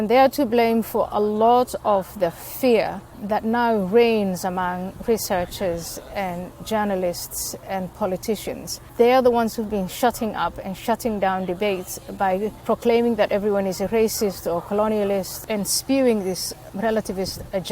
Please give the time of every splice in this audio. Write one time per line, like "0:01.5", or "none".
0:03.1
0:08.8
0:12.6
0:15.4
0:16.6